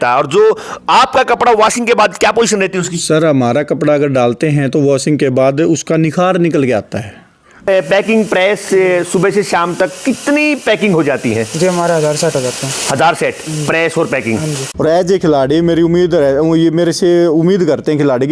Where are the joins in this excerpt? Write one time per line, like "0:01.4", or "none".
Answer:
0:07.5
0:14.6